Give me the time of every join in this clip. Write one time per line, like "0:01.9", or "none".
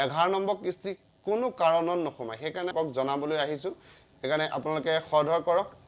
0:02.7